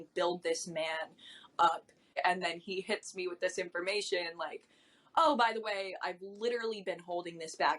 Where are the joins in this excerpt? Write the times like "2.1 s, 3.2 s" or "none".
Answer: 2.2 s